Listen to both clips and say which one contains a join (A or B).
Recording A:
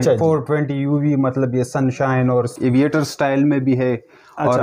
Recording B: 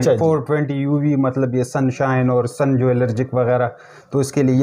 A